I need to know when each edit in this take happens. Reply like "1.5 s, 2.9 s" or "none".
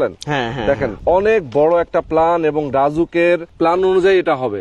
1.0 s, 3.5 s

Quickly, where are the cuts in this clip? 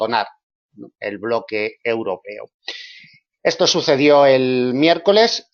2.5 s

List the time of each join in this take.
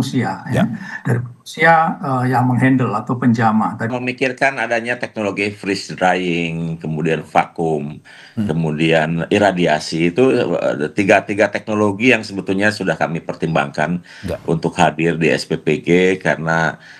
3.9 s

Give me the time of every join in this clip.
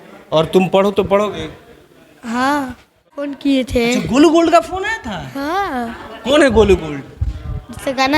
3.4 s

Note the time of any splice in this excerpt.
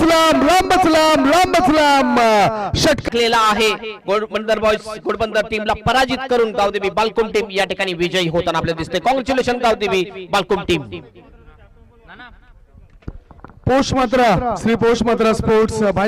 3.0 s

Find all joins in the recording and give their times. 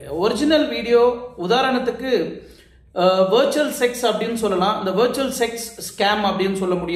none

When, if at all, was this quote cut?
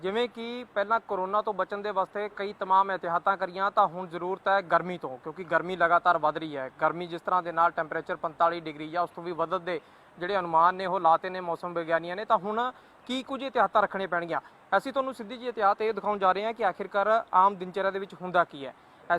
5.7 s

